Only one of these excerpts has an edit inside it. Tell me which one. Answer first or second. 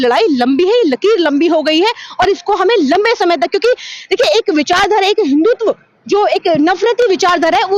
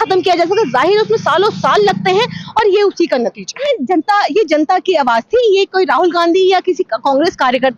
second